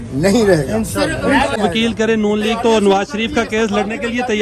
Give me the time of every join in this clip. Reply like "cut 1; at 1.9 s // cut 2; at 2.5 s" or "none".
cut 1; at 1.6 s